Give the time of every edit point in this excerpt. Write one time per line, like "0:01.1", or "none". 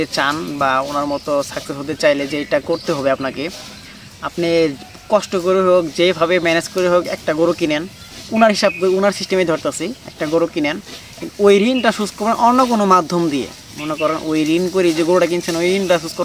none